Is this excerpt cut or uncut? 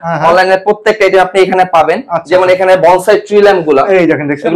uncut